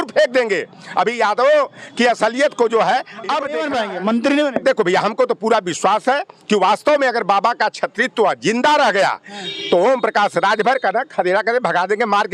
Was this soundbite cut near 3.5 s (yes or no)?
yes